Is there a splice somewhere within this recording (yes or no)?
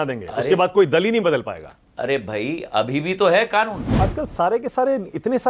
yes